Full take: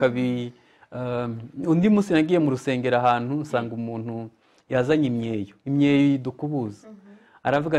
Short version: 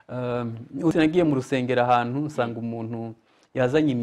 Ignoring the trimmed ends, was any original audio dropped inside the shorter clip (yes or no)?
yes